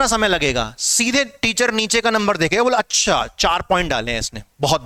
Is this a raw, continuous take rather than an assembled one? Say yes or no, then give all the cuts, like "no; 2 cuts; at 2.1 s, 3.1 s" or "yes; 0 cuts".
yes; 0 cuts